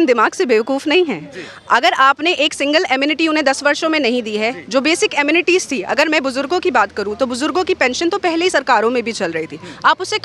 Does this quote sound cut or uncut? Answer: uncut